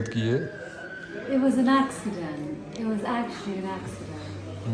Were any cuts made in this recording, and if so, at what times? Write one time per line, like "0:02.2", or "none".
none